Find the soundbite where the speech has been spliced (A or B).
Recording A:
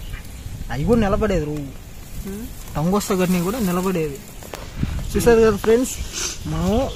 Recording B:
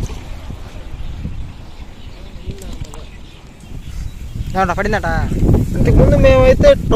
B